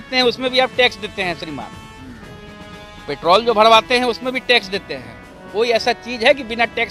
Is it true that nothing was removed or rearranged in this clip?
yes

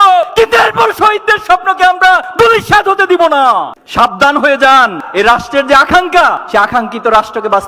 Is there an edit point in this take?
yes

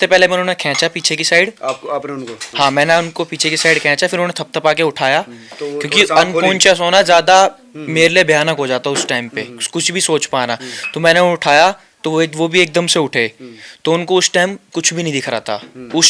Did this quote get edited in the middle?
no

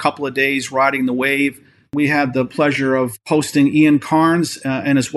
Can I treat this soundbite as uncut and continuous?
no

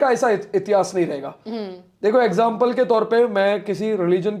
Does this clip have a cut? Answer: no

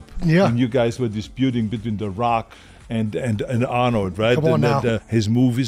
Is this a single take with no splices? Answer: yes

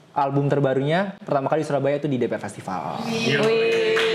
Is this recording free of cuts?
yes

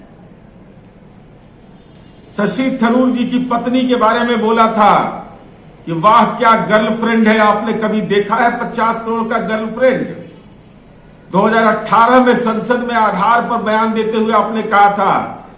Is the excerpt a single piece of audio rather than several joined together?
yes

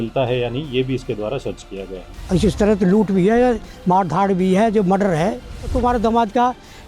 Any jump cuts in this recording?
yes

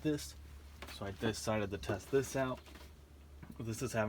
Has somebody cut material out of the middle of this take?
no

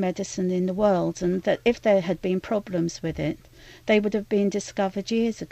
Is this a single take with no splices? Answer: yes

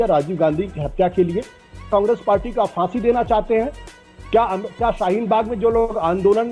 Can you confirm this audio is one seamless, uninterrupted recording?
no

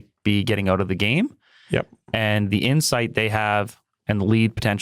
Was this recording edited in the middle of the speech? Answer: no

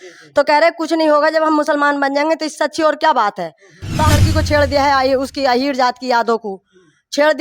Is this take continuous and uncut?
no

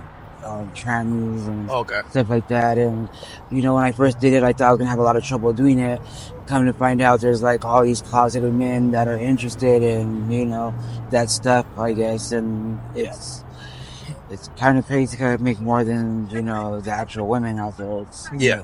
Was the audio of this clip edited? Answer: no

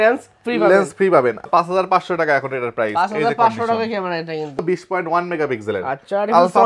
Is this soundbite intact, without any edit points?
no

